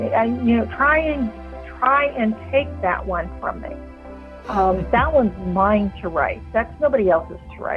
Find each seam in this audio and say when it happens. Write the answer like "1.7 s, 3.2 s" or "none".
none